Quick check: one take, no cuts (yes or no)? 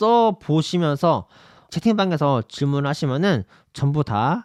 yes